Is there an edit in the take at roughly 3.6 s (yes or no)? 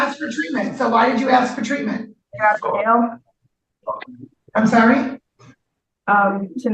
no